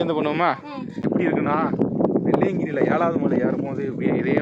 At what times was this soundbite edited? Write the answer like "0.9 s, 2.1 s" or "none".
1.1 s